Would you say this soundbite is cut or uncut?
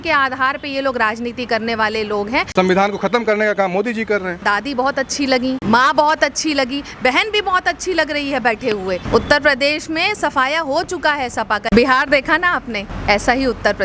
cut